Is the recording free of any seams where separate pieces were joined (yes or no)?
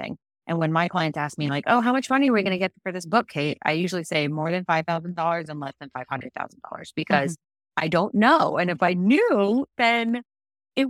yes